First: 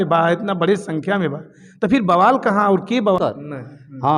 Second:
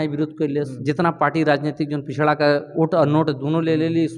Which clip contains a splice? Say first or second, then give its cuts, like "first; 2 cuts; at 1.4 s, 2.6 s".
first; 1 cut; at 3.2 s